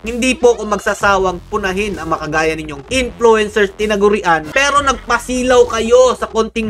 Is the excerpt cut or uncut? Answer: cut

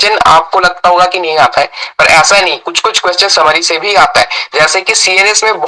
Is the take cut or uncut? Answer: uncut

